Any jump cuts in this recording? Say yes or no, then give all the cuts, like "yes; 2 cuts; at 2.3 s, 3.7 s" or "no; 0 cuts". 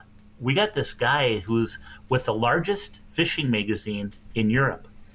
no; 0 cuts